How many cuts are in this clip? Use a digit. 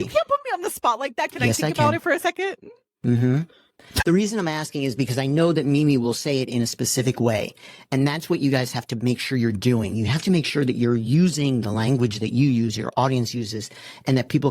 1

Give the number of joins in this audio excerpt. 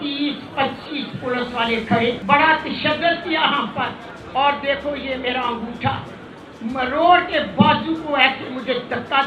1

